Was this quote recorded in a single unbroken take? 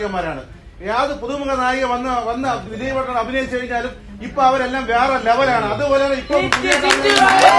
yes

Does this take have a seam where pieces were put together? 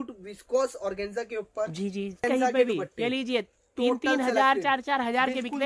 yes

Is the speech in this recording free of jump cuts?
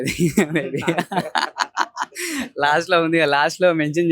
yes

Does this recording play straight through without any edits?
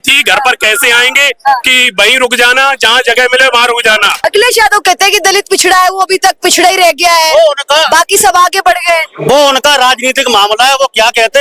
no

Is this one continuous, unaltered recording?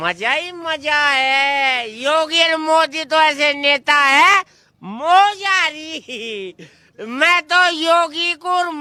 yes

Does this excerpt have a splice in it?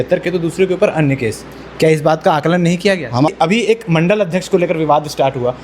yes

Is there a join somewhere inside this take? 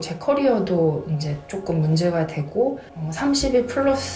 yes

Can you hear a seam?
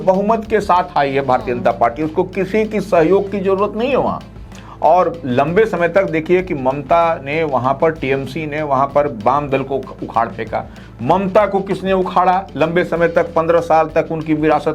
no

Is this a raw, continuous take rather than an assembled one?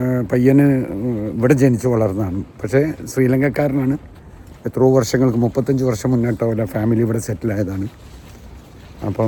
yes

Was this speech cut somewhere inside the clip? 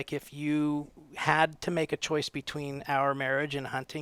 no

